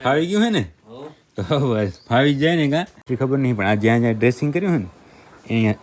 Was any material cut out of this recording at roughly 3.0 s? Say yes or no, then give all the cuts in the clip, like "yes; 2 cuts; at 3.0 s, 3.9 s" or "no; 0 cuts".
yes; 1 cut; at 3.0 s